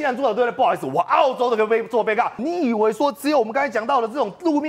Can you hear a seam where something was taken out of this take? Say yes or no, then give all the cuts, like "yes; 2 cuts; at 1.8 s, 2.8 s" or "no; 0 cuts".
yes; 1 cut; at 2.4 s